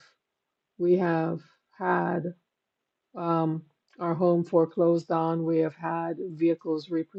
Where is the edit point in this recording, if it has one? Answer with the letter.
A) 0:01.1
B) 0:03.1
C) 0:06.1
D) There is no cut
D